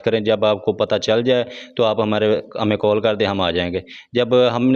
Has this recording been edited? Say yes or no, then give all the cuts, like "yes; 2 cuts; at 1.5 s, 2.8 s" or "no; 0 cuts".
no; 0 cuts